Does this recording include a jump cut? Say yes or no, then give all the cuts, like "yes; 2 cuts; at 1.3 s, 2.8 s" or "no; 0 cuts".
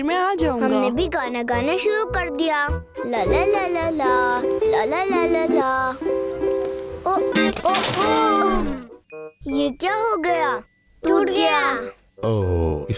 yes; 2 cuts; at 3.1 s, 12.0 s